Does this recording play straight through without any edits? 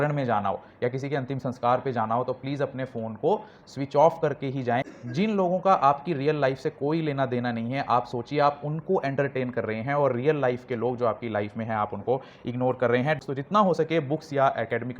no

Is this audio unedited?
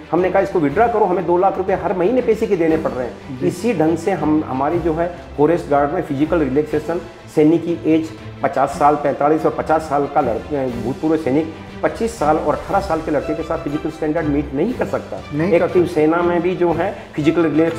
yes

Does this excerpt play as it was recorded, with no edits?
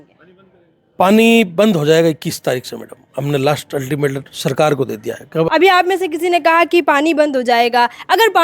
no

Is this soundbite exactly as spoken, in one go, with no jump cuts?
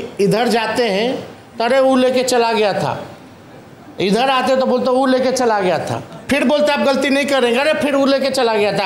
yes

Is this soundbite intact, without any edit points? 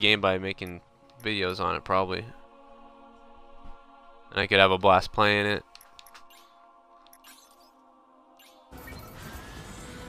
no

